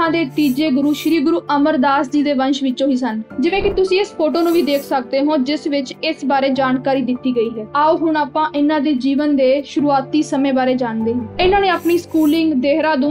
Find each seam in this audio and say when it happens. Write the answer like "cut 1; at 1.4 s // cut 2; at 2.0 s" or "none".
none